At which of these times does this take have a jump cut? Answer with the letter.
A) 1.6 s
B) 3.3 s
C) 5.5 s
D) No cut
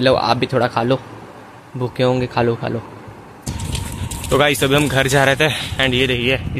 B